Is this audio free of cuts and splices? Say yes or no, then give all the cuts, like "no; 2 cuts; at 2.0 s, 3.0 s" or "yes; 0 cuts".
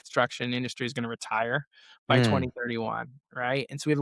yes; 0 cuts